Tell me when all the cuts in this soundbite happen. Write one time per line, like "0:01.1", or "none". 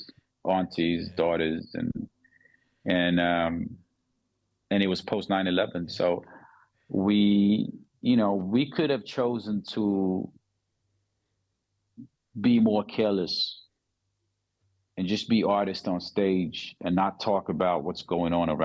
none